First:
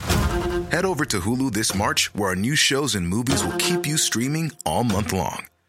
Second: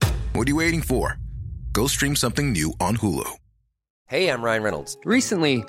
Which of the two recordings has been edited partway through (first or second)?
second